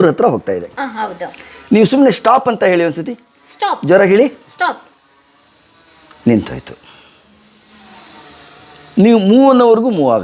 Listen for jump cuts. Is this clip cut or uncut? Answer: uncut